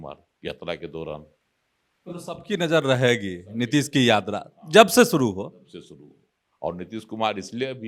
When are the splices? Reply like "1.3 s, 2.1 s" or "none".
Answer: none